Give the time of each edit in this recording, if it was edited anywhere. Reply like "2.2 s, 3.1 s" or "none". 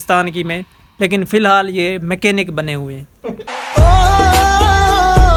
none